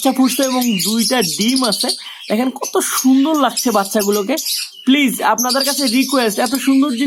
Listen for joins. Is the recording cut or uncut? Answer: uncut